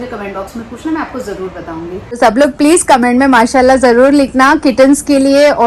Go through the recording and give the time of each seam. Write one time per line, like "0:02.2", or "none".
0:02.2